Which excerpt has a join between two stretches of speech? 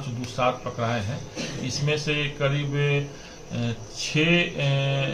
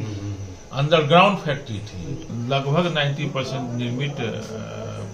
second; 1 cut; at 2.3 s

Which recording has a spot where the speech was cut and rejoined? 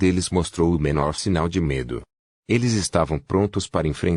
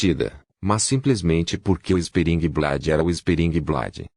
second; 1 cut; at 1.6 s

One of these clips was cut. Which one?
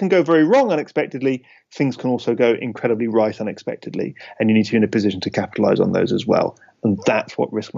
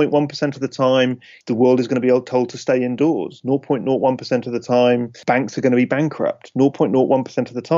second; 2 cuts; at 1.3 s, 5.1 s

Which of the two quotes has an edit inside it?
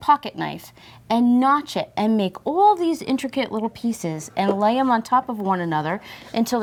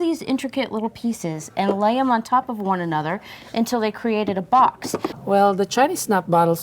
second; 1 cut; at 5.1 s

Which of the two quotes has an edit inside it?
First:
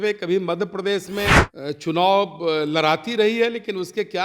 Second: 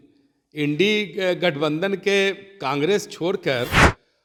first; 1 cut; at 1.5 s

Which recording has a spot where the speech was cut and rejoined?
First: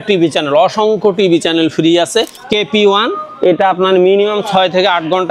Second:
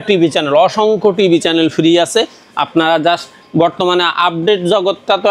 first; 1 cut; at 2.4 s

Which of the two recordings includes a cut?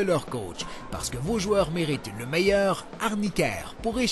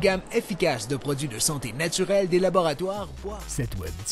second; 1 cut; at 3.1 s

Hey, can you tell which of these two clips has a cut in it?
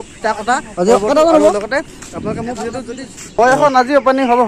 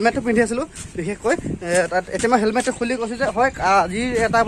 first; 2 cuts; at 1.5 s, 3.4 s

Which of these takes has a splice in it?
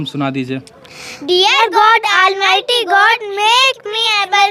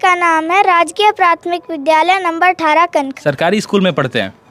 second; 1 cut; at 3.2 s

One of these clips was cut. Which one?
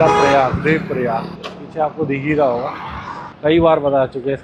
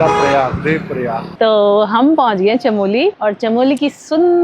second; 1 cut; at 1.3 s

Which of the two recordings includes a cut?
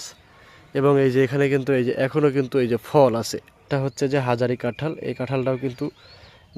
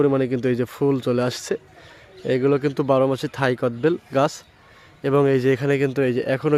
first; 1 cut; at 3.7 s

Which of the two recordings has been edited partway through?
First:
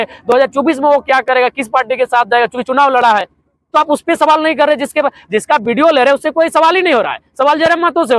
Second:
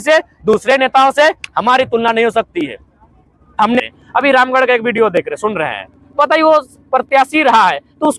second; 1 cut; at 3.8 s

